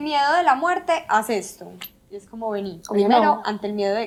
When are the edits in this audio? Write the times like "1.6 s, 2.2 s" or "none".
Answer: none